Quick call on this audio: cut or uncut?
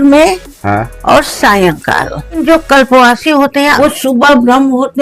cut